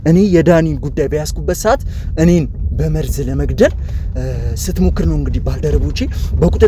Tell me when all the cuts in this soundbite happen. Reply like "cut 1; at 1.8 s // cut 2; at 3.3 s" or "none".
none